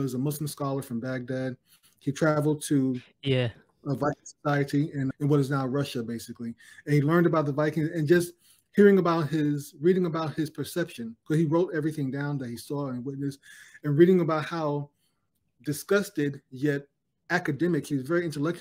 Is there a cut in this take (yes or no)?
no